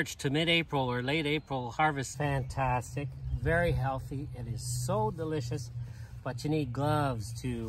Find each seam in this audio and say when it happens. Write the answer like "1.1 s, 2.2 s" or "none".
2.1 s